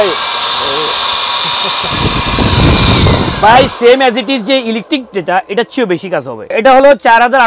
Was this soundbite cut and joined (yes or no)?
no